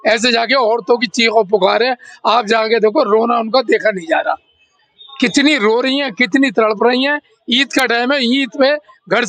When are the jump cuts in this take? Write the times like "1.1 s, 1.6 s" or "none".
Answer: none